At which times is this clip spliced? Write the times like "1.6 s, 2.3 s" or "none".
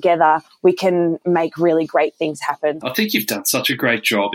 none